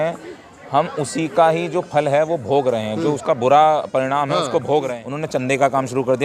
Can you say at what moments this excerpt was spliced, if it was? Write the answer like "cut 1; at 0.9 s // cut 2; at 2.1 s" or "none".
cut 1; at 5.0 s